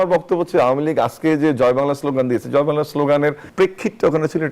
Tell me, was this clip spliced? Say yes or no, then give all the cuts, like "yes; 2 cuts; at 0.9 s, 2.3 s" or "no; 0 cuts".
yes; 1 cut; at 3.4 s